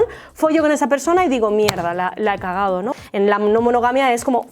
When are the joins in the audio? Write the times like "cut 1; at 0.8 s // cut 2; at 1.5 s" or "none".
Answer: cut 1; at 2.9 s